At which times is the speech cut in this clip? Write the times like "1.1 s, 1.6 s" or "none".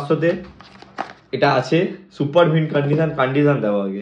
none